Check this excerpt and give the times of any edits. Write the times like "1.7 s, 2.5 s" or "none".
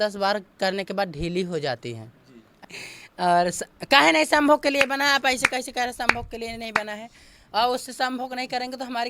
2.6 s

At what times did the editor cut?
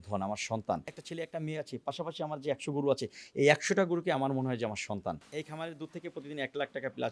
1.0 s, 5.3 s

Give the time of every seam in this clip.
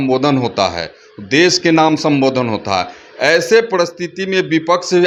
none

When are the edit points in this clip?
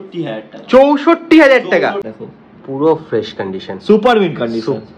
2.1 s

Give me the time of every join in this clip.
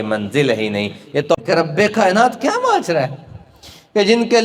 1.4 s

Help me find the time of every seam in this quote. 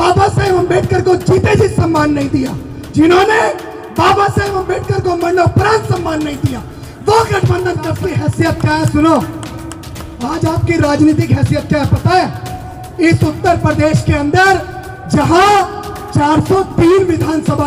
8.0 s

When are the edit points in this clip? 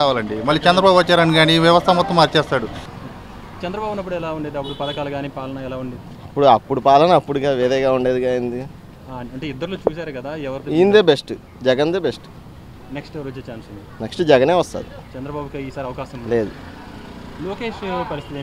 2.8 s

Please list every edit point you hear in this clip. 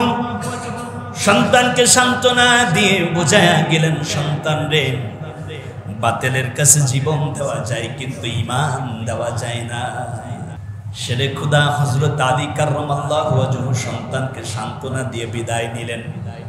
10.6 s

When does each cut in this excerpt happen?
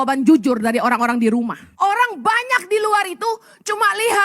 1.6 s

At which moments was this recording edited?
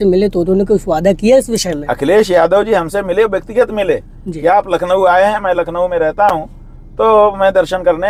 none

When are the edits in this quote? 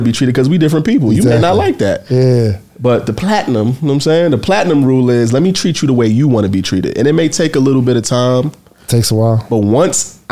none

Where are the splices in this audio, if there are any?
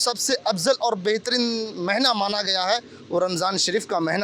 none

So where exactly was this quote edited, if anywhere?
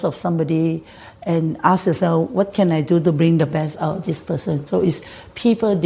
none

